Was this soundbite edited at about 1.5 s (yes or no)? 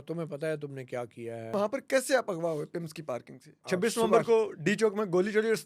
yes